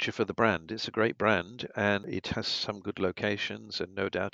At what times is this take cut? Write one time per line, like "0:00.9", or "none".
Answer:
0:02.1